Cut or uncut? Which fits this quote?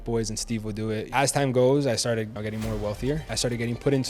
cut